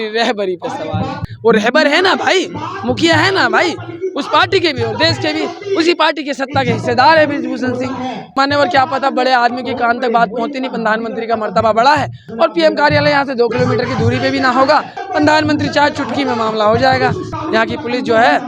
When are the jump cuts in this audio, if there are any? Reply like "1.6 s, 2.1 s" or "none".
1.2 s, 8.3 s, 12.2 s, 15.0 s, 17.3 s